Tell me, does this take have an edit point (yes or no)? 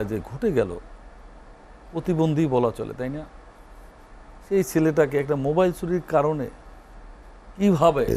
no